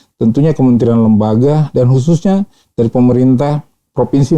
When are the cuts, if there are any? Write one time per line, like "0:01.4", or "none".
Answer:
none